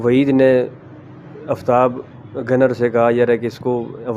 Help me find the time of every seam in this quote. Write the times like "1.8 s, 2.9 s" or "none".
none